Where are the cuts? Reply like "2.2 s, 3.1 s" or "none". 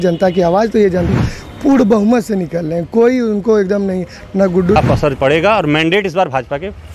1.1 s, 4.8 s